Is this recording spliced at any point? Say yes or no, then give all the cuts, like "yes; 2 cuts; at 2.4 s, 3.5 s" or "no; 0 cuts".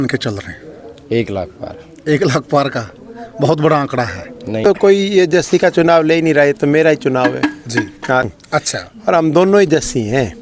yes; 2 cuts; at 4.6 s, 8.3 s